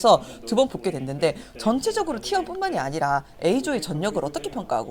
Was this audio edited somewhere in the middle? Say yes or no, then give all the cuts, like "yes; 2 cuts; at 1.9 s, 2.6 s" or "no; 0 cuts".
no; 0 cuts